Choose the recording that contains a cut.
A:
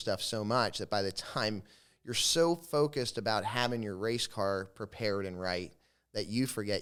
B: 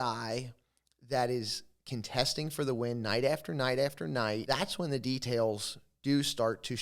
B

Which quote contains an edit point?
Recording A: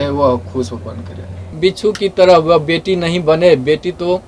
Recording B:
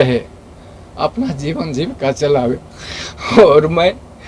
A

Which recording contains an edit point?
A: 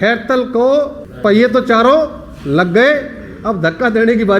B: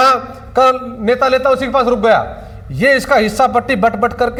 A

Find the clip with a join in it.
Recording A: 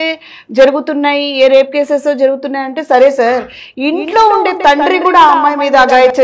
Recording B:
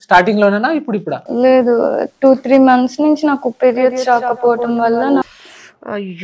B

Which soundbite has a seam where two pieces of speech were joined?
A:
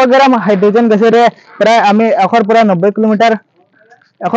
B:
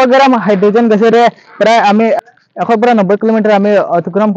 B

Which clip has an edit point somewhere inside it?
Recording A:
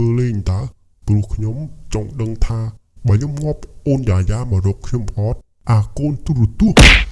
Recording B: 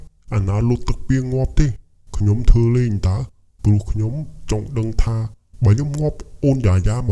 A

